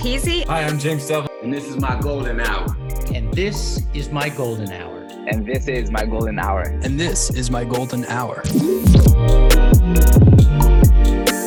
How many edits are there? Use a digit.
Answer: 0